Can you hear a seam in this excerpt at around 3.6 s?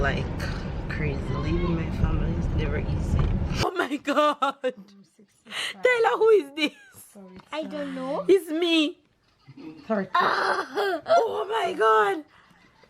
yes; 1 cut; at 3.6 s

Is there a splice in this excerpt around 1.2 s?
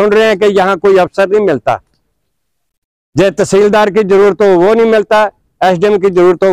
no; 0 cuts

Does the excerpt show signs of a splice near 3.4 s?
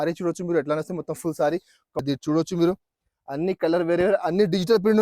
no; 1 cut; at 2.0 s

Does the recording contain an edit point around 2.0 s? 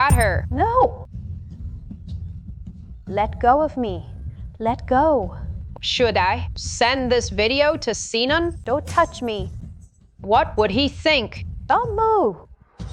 no; 0 cuts

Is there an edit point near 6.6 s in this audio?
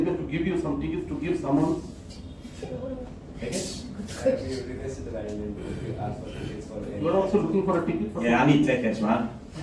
no; 0 cuts

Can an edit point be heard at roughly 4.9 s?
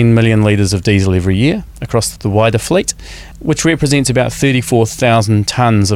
no; 2 cuts; at 2.1 s, 3.3 s

